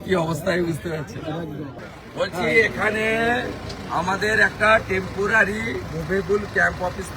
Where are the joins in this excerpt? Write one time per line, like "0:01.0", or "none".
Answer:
0:01.8